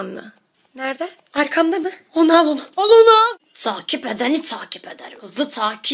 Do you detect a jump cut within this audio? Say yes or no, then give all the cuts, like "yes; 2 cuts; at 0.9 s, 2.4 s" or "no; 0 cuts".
yes; 1 cut; at 3.5 s